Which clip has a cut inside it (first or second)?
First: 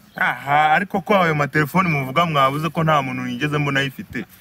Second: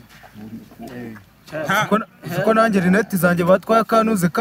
second